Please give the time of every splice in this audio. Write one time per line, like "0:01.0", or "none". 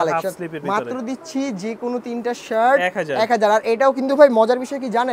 none